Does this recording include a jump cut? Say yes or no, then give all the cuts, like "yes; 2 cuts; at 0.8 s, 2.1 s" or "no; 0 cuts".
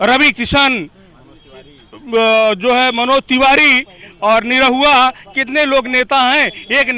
no; 0 cuts